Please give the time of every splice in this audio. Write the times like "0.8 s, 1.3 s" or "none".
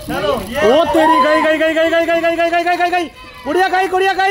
none